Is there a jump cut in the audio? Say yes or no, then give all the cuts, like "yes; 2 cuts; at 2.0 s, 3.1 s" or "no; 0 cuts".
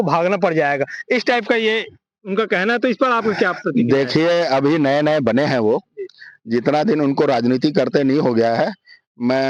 no; 0 cuts